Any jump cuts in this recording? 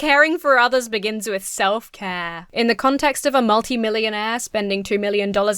yes; 1 cut; at 2.3 s

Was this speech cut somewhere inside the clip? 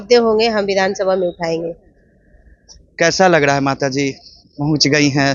no; 0 cuts

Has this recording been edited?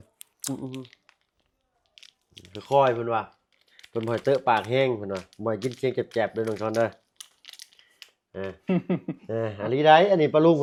no; 0 cuts

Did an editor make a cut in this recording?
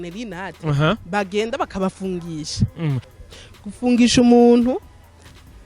yes; 1 cut; at 3.1 s

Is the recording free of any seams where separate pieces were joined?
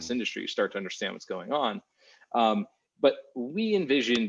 yes; 0 cuts

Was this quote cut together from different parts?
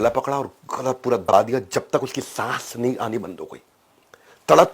yes; 1 cut; at 1.3 s

